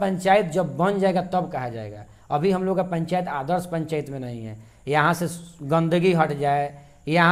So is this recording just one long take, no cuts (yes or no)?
yes